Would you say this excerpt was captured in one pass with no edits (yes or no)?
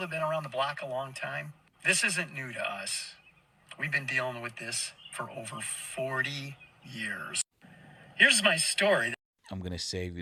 yes